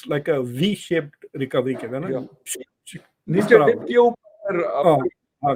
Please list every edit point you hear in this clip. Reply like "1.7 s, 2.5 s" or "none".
none